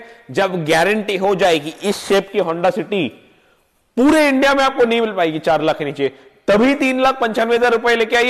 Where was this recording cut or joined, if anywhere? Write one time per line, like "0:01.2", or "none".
none